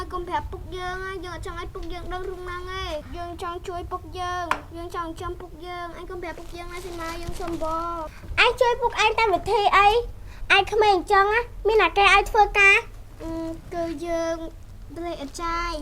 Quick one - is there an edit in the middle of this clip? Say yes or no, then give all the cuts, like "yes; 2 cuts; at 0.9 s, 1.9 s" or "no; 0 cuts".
yes; 2 cuts; at 3.1 s, 8.2 s